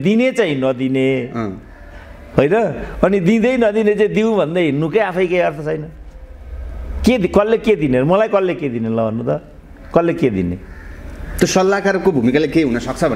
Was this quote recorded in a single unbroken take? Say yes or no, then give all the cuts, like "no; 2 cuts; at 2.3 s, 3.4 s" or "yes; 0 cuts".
yes; 0 cuts